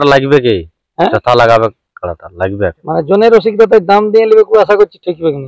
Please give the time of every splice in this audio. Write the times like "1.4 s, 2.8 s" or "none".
none

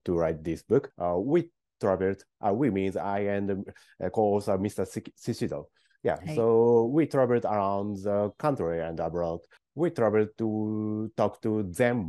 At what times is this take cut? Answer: 0.9 s

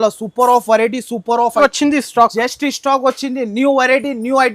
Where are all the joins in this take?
1.6 s

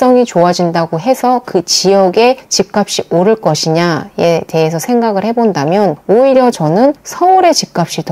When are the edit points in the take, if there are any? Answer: none

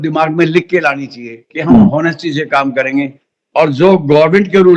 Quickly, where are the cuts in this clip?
none

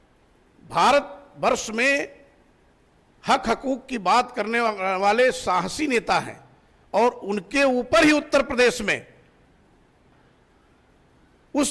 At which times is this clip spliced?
10.2 s

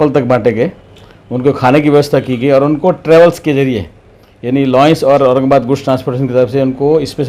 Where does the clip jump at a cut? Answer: none

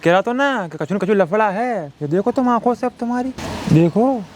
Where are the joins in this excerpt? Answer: 3.5 s

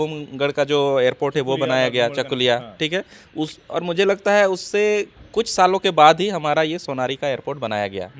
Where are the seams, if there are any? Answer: none

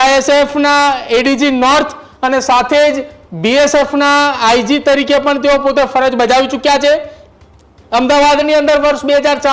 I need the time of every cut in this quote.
none

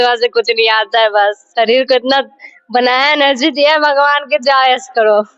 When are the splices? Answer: none

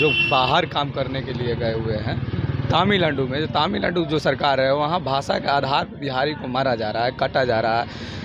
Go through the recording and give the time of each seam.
none

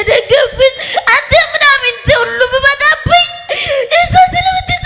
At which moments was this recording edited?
none

